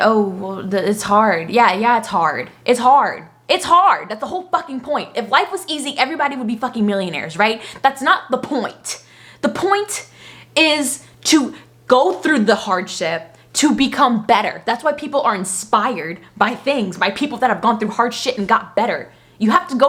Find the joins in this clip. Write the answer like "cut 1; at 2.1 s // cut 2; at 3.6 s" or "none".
none